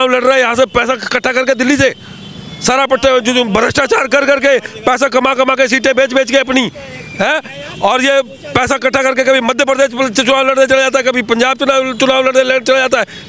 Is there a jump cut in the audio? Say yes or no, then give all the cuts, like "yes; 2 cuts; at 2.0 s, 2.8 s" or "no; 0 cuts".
no; 0 cuts